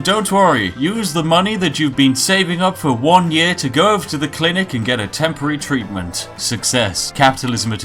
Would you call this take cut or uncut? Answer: cut